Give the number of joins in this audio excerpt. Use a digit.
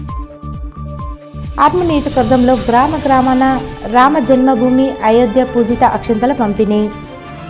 1